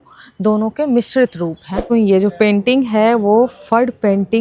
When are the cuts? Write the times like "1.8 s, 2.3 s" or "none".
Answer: 1.8 s